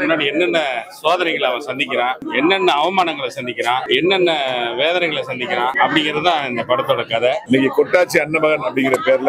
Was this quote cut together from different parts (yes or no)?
yes